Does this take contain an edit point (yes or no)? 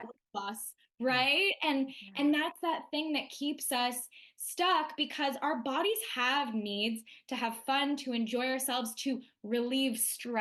no